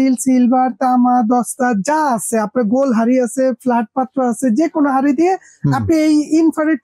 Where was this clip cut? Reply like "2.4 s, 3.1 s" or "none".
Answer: none

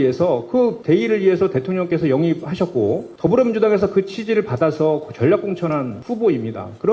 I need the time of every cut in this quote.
none

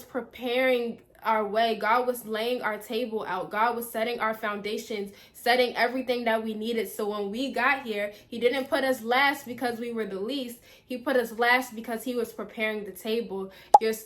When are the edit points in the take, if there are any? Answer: none

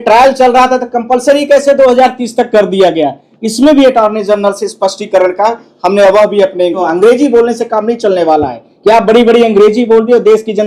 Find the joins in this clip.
6.8 s

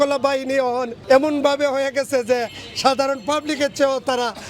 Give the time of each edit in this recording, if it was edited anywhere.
0.9 s

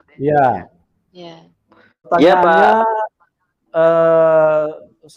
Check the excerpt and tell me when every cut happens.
2.1 s

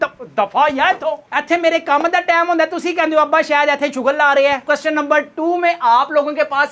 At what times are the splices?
4.6 s

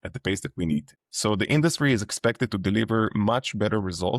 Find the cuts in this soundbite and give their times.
0.9 s

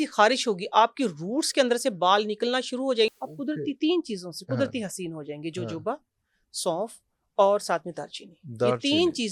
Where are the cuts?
3.1 s

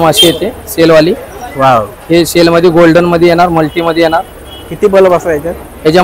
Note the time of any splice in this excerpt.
none

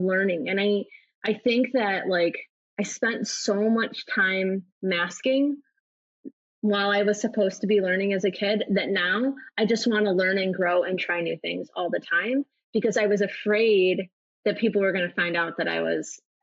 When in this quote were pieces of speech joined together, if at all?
none

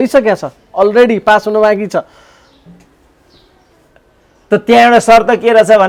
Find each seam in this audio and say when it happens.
none

